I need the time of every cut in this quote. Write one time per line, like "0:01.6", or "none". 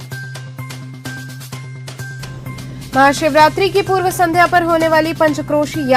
0:01.8